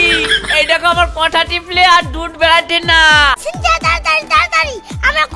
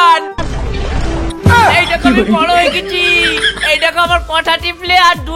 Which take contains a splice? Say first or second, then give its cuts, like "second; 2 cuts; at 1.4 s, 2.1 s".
first; 1 cut; at 3.4 s